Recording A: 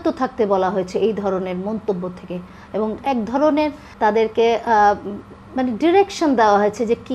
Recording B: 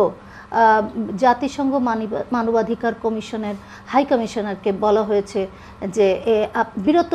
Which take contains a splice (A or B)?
A